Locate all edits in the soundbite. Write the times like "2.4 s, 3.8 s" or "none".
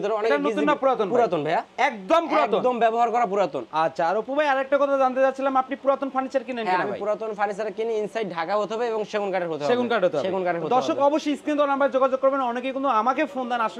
none